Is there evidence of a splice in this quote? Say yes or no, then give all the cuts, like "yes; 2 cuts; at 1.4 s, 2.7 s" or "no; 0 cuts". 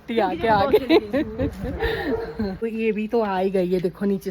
yes; 1 cut; at 2.6 s